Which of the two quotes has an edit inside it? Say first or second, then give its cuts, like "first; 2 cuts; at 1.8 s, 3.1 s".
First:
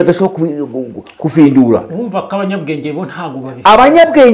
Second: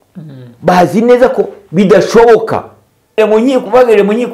second; 1 cut; at 3.2 s